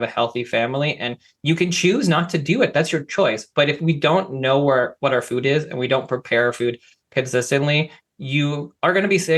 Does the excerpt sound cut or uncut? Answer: uncut